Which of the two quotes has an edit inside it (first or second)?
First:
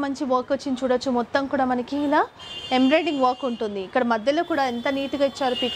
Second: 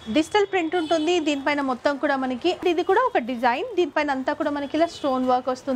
second